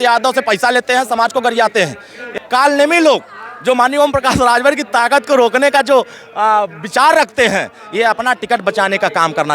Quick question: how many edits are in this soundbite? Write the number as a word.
one